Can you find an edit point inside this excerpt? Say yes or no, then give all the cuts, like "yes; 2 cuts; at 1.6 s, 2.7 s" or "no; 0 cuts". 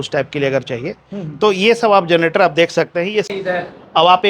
yes; 1 cut; at 3.3 s